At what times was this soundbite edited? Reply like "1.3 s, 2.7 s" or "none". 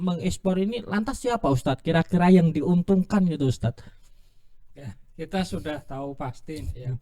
none